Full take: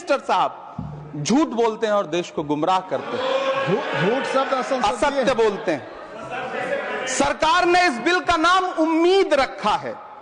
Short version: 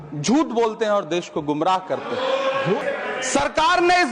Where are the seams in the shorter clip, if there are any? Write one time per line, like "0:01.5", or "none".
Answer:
0:02.8